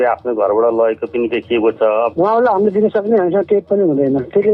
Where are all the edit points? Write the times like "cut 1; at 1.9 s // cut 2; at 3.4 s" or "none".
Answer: cut 1; at 2.1 s